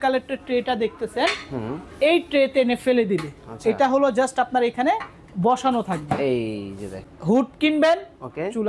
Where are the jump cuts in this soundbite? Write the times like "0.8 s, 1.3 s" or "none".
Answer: 7.0 s

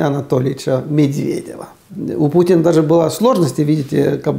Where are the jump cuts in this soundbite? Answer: 1.9 s

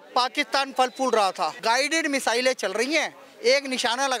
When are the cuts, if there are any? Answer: 1.6 s

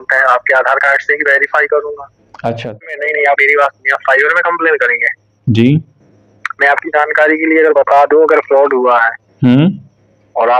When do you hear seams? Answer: 2.9 s

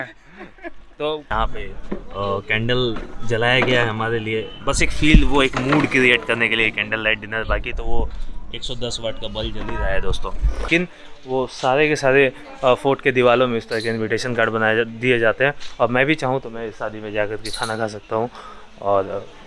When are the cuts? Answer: 1.3 s, 10.7 s

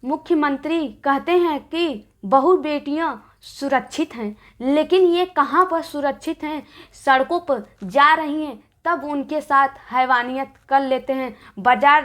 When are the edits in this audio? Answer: 2.2 s

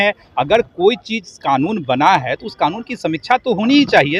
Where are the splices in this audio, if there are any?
none

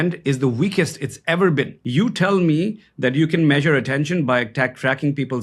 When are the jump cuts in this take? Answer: 1.8 s

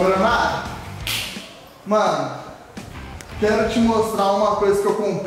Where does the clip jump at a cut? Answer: none

